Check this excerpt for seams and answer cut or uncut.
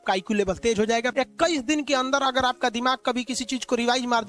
cut